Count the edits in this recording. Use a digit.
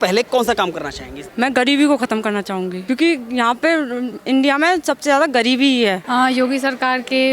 1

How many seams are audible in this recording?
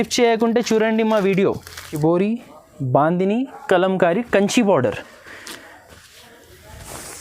1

